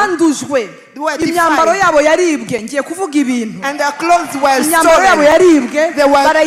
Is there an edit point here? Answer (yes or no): no